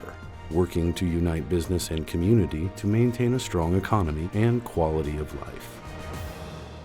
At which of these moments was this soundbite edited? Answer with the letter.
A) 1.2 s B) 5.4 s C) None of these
B